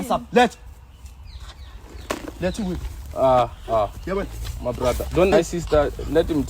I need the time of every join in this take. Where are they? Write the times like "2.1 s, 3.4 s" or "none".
5.3 s